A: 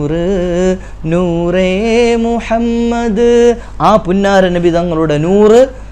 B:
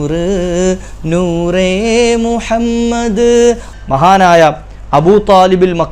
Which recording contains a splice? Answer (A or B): B